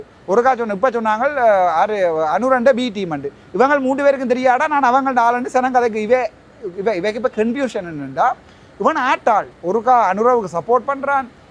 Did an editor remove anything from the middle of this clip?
no; 0 cuts

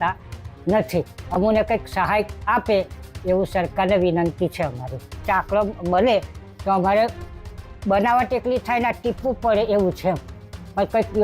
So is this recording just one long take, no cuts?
yes; 0 cuts

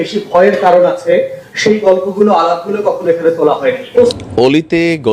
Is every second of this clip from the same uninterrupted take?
no; 1 cut; at 4.2 s

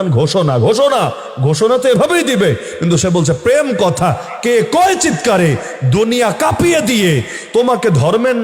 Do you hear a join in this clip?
no; 0 cuts

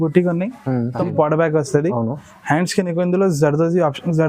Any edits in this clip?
yes; 1 cut; at 1.0 s

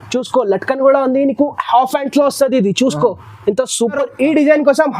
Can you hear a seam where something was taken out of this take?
yes; 1 cut; at 4.1 s

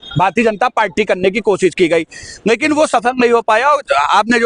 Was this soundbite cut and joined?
no; 0 cuts

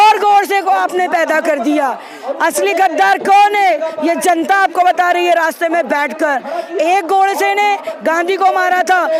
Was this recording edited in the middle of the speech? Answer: no; 0 cuts

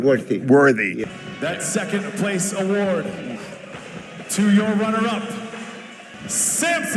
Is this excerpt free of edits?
no; 1 cut; at 1.0 s

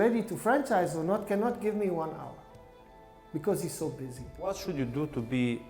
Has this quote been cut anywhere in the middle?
yes; 1 cut; at 4.4 s

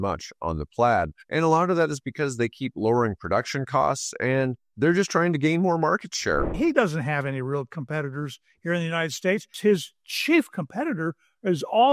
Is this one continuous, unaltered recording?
no; 2 cuts; at 6.5 s, 9.5 s

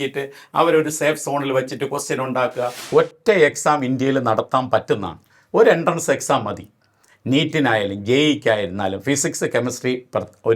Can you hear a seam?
yes; 1 cut; at 2.8 s

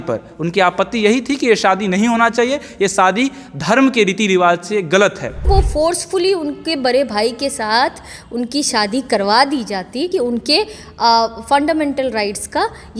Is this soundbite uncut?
no; 2 cuts; at 5.5 s, 10.1 s

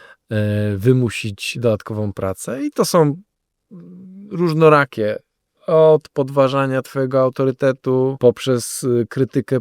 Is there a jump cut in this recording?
yes; 1 cut; at 8.1 s

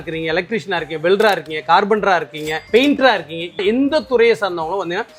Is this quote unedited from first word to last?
yes; 0 cuts

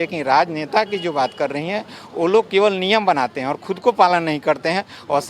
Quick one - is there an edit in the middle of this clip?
no; 0 cuts

